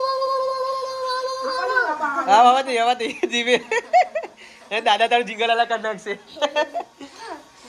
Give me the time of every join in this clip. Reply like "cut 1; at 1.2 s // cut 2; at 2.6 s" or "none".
none